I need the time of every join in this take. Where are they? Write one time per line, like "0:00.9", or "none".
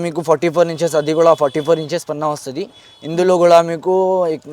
none